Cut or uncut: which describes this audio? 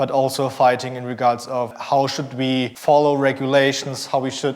cut